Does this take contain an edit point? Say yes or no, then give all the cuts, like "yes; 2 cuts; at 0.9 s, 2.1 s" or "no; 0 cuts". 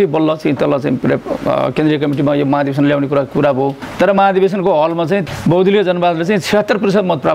yes; 2 cuts; at 3.8 s, 5.2 s